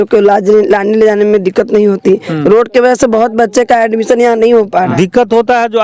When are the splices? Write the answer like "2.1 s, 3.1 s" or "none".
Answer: 4.9 s